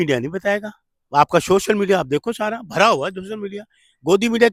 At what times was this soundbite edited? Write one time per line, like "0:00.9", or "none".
none